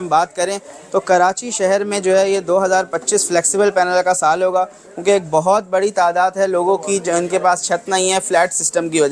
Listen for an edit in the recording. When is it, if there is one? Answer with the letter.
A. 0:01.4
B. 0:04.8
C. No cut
C